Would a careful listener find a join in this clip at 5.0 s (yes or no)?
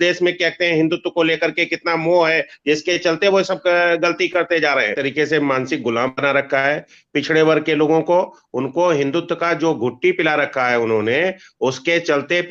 yes